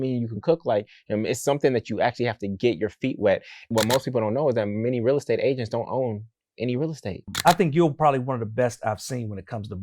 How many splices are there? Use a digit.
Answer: 2